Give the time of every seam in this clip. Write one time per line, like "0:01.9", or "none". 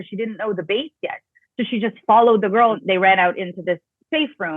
0:02.8